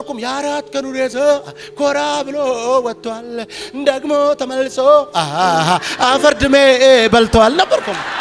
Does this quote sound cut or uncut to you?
uncut